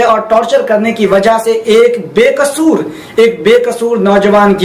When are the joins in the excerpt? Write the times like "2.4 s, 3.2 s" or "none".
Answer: none